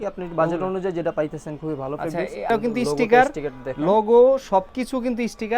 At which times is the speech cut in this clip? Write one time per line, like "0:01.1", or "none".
0:02.5